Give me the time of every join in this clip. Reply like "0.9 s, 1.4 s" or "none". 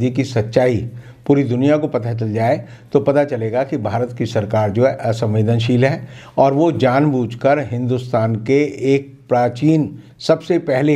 none